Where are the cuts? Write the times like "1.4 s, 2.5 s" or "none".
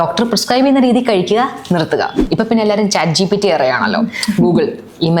2.2 s